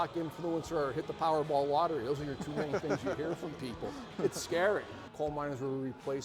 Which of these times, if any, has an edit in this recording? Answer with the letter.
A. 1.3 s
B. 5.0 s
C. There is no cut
B